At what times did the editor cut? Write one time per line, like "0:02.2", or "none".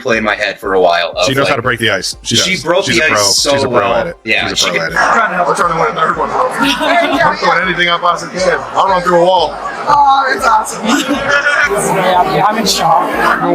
0:04.8